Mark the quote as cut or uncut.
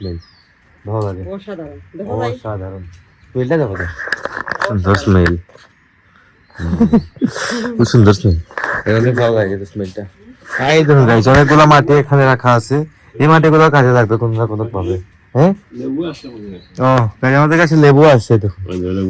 uncut